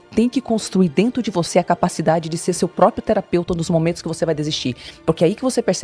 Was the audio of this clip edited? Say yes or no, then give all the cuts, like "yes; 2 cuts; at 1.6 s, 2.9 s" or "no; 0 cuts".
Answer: no; 0 cuts